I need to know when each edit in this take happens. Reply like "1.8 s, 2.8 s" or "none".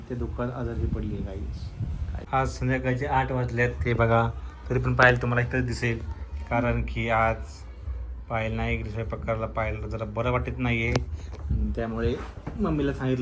2.3 s